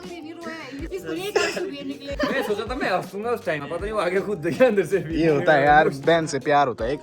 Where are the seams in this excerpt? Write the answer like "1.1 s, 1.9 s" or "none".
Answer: 0.9 s, 2.0 s, 3.6 s, 6.0 s